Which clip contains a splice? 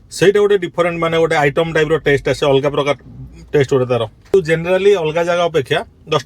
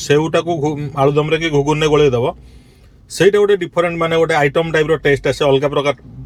first; 1 cut; at 4.3 s

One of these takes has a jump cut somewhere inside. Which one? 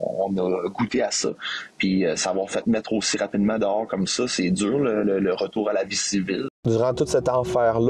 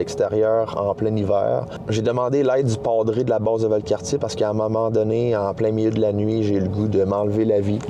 first; 1 cut; at 6.5 s

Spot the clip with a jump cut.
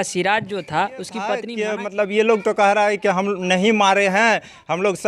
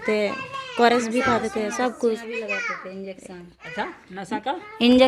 first; 1 cut; at 1.5 s

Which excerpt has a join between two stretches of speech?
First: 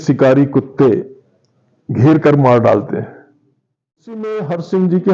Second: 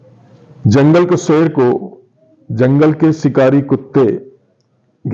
first; 1 cut; at 4.2 s

